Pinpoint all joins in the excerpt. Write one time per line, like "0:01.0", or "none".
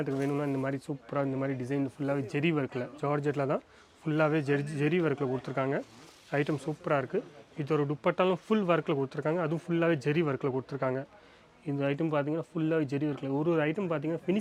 none